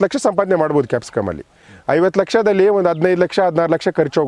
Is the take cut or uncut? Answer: uncut